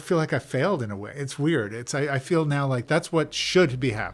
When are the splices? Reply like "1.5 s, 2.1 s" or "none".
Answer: 2.8 s